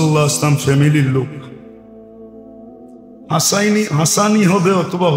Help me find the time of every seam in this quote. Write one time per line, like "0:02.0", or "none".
none